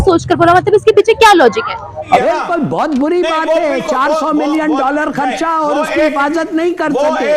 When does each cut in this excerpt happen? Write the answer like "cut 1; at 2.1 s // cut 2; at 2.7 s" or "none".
cut 1; at 2.2 s